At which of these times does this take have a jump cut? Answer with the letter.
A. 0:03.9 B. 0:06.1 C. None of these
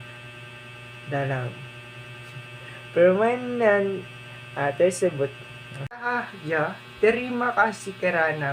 B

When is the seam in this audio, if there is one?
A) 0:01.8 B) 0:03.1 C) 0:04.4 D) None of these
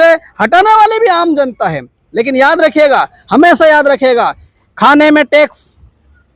C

